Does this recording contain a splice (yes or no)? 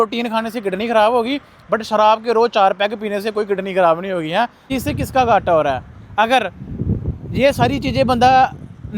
yes